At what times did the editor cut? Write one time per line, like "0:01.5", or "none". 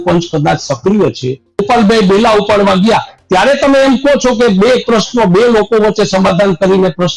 0:01.6